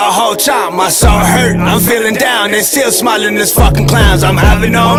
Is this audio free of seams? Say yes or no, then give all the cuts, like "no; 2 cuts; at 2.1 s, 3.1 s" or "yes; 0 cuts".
yes; 0 cuts